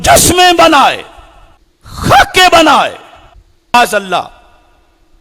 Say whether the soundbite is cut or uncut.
cut